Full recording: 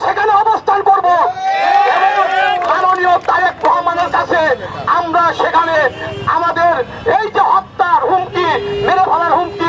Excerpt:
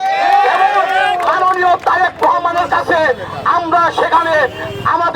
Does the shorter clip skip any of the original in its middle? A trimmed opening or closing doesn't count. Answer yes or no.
no